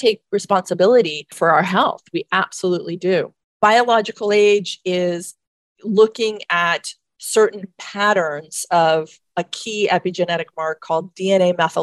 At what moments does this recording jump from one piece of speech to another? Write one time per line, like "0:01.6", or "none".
0:01.2
0:03.5